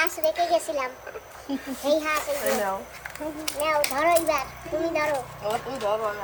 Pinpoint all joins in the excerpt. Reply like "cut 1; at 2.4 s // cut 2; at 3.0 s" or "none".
none